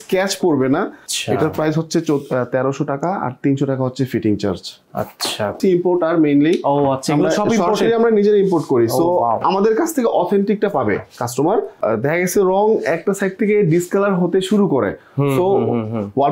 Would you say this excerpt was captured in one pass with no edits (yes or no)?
no